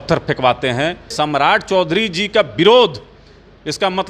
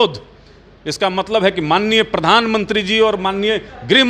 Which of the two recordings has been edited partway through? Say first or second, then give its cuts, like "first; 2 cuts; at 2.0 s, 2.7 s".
first; 1 cut; at 1.1 s